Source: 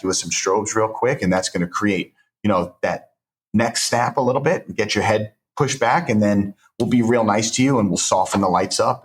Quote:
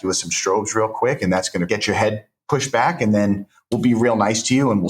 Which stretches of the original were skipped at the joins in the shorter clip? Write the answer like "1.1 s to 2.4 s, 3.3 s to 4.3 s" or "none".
1.7 s to 4.7 s